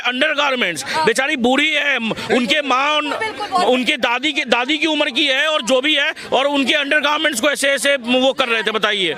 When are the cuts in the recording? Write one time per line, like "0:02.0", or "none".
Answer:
none